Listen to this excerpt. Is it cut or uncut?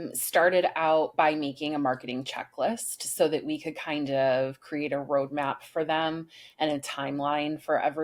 uncut